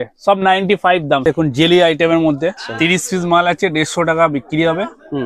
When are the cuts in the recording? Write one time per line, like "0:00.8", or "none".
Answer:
0:01.2
0:02.6